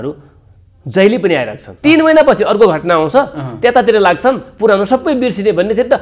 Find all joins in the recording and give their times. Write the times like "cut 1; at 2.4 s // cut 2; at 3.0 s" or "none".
cut 1; at 1.6 s